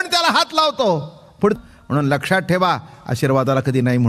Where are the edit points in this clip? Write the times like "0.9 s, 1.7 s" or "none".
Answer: 1.6 s